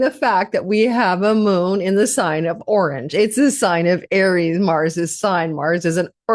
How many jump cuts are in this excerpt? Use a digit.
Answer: 0